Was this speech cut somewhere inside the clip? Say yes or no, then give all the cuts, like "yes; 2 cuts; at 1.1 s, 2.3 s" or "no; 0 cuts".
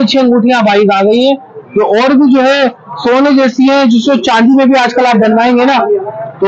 no; 0 cuts